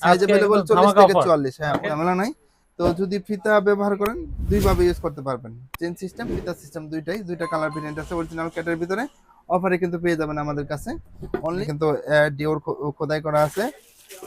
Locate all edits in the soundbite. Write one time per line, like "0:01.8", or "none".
0:01.9
0:11.6